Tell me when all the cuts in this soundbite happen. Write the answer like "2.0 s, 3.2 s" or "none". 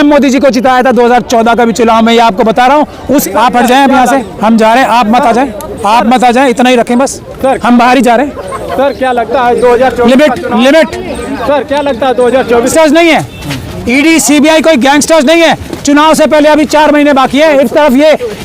3.2 s, 12.7 s